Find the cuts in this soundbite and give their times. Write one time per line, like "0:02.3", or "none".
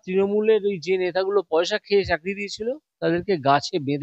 none